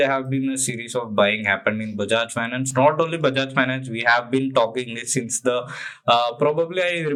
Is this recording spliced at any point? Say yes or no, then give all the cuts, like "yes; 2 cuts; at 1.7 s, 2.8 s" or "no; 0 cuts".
no; 0 cuts